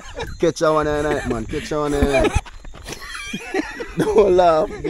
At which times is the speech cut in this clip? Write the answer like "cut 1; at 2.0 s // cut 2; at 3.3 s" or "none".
cut 1; at 2.4 s